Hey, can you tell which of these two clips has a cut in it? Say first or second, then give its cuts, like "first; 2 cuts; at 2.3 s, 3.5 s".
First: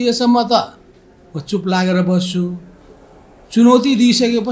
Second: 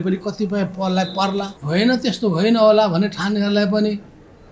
second; 1 cut; at 1.6 s